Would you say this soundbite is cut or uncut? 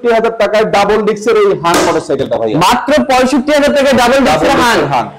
uncut